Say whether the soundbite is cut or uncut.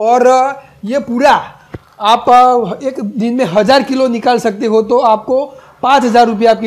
uncut